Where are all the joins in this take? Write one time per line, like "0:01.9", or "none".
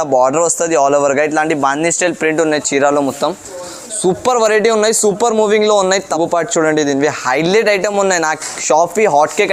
0:06.2

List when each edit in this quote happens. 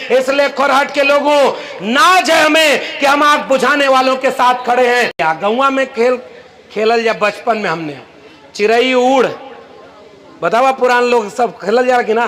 0:05.2

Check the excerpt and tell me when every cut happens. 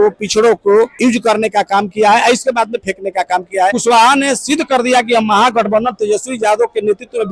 0:00.9
0:03.8

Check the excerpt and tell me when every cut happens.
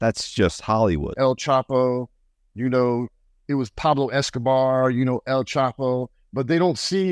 0:01.1

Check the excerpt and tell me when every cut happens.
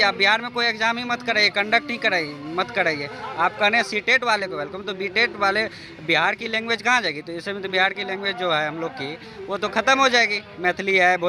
none

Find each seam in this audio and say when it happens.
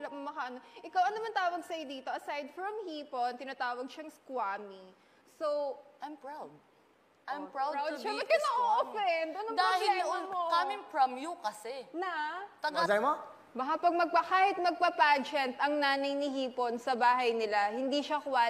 0:12.9

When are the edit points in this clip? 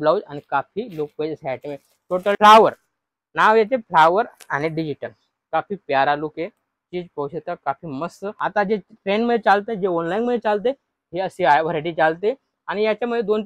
0:02.4
0:08.4

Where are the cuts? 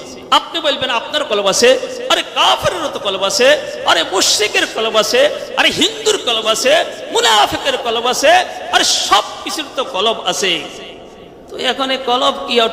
none

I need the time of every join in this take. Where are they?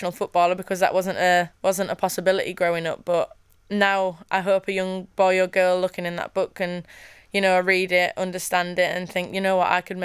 none

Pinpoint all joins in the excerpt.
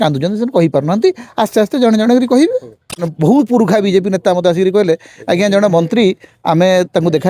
0:03.0

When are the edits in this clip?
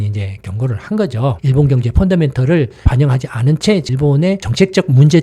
0:01.4

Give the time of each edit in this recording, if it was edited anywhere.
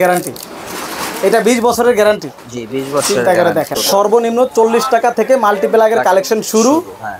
0:03.8

